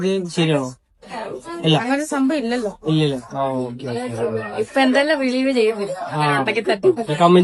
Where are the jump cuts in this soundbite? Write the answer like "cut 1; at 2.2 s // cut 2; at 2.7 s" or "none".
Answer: none